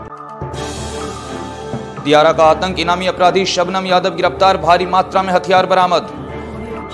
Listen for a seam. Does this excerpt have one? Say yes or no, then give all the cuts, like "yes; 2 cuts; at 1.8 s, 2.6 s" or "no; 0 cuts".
yes; 1 cut; at 1.9 s